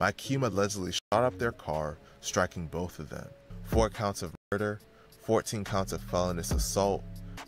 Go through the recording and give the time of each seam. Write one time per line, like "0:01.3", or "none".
0:03.3